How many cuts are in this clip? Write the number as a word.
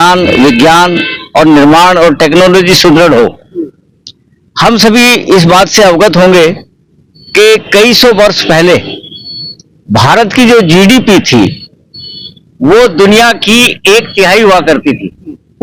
zero